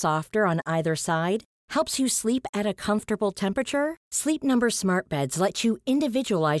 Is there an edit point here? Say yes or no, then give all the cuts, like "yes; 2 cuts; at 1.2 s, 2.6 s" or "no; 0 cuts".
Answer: no; 0 cuts